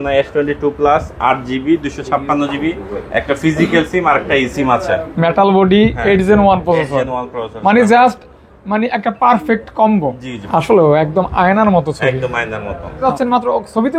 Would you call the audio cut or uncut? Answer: cut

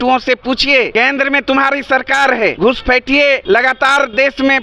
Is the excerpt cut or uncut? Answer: cut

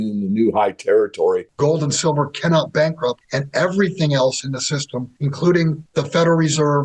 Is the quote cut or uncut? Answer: cut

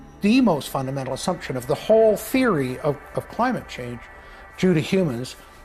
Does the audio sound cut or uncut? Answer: uncut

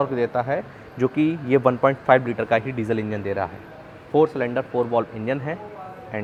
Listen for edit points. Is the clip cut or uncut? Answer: uncut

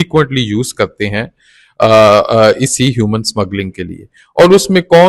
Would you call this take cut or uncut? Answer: uncut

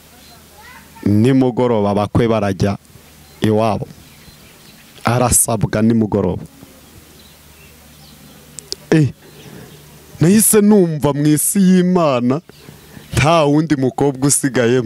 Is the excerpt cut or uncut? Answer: uncut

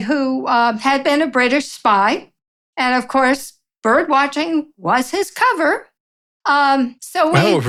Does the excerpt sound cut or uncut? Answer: uncut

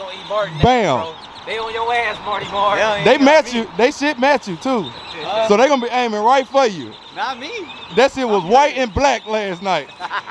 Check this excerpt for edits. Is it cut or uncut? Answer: uncut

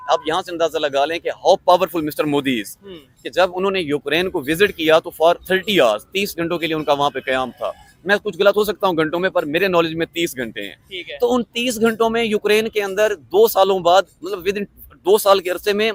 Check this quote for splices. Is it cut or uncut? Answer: uncut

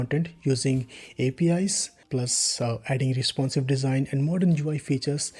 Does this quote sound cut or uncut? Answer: cut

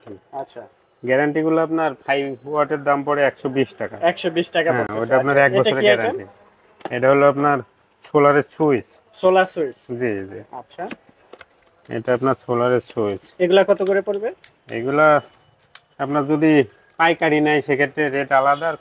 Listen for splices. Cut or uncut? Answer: uncut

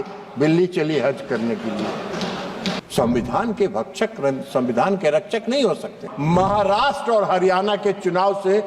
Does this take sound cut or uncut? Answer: cut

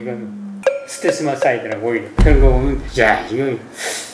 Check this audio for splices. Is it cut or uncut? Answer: cut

